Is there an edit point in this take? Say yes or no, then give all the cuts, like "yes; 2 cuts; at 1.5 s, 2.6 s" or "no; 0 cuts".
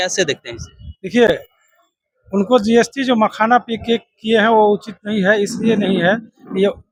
no; 0 cuts